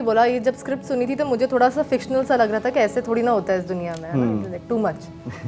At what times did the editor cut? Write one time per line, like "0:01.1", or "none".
none